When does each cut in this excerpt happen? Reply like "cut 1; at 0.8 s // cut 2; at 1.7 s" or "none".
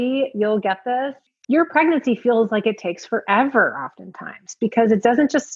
cut 1; at 1.3 s